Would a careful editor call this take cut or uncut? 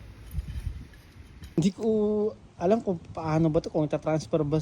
cut